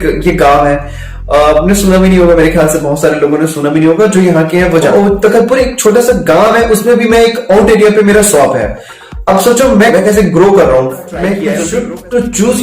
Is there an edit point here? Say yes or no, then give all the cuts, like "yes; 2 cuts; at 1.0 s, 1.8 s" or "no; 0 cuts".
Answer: yes; 1 cut; at 11.5 s